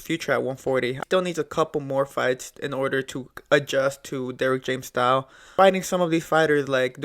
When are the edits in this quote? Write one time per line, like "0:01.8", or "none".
0:01.0
0:05.5